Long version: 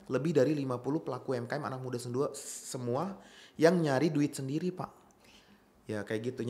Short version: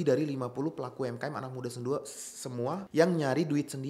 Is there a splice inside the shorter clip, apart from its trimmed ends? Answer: yes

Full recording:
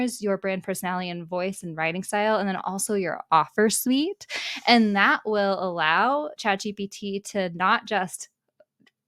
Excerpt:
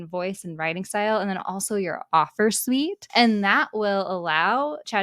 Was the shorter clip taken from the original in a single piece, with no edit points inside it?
no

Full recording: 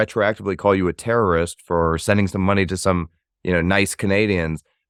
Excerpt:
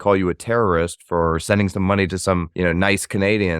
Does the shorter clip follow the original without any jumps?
no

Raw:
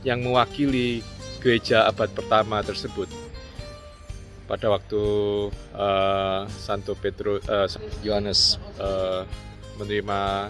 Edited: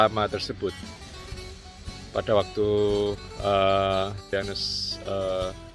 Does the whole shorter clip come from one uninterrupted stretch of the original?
no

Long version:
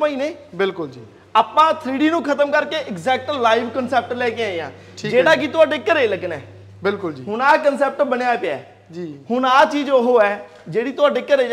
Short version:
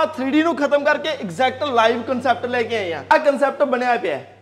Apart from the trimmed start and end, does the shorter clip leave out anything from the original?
yes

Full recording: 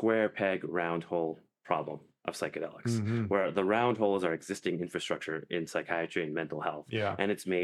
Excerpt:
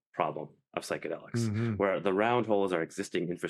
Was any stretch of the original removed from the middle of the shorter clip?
no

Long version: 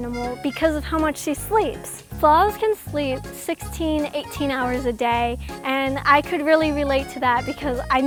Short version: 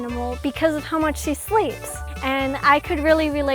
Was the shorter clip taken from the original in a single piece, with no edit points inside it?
no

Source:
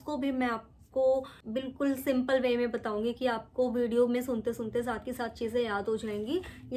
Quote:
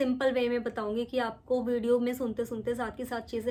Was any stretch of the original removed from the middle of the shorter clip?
no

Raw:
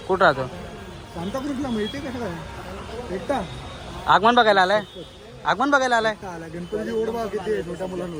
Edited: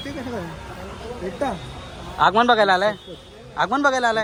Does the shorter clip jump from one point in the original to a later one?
no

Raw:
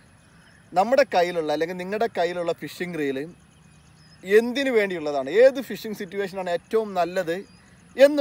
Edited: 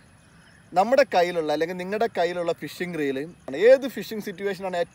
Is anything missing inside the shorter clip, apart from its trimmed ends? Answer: yes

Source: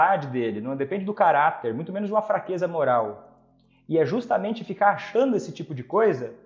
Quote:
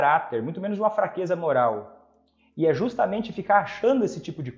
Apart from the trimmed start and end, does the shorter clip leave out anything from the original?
no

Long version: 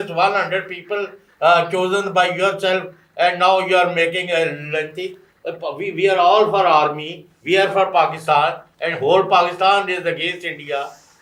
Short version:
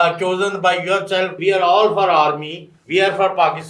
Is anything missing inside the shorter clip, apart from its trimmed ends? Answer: yes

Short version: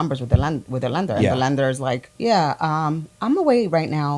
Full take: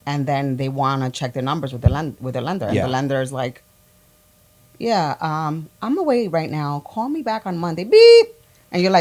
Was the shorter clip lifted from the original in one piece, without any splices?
no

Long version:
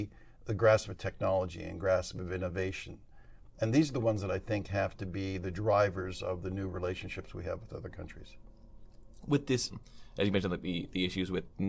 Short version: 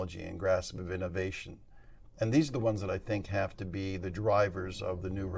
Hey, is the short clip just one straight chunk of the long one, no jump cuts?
yes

